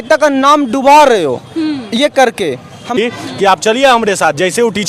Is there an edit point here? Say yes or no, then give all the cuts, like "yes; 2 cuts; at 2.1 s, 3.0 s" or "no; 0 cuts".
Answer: yes; 1 cut; at 3.0 s